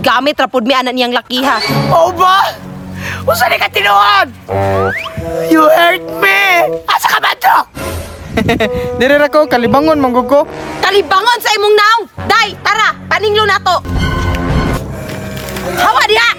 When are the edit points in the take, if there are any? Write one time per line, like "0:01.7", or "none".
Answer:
none